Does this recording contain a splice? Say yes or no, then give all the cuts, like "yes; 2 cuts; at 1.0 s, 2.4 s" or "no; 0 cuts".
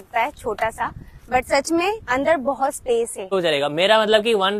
yes; 1 cut; at 3.3 s